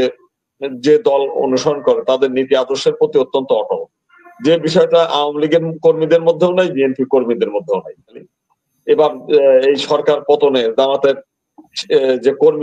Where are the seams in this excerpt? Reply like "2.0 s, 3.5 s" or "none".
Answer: 8.3 s